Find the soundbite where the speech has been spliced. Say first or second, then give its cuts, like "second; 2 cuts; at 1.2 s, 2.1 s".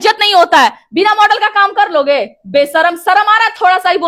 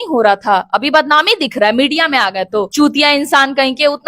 second; 1 cut; at 2.7 s